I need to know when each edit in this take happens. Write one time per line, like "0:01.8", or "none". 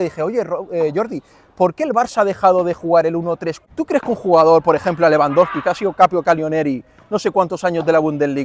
0:03.5